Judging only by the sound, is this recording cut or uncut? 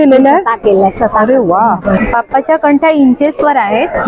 cut